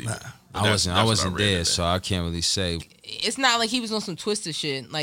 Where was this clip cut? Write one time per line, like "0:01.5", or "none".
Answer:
0:02.8